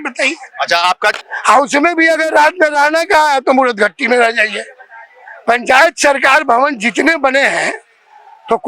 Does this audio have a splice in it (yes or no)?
yes